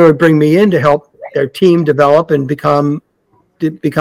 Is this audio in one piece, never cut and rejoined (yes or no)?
yes